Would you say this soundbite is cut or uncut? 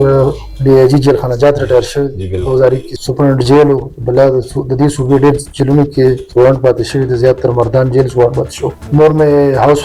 cut